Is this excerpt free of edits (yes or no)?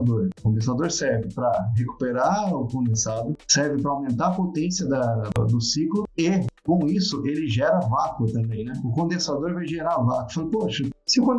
yes